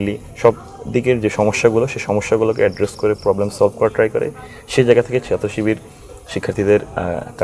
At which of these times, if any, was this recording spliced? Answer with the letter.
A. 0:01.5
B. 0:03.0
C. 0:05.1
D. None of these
D